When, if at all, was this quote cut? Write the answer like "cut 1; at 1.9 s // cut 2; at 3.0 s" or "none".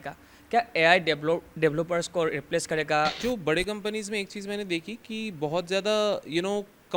cut 1; at 3.2 s